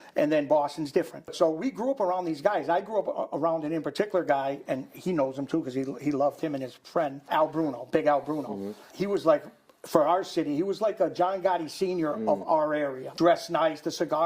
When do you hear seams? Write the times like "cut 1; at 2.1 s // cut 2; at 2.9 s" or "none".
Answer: cut 1; at 1.3 s // cut 2; at 7.2 s // cut 3; at 8.9 s // cut 4; at 13.0 s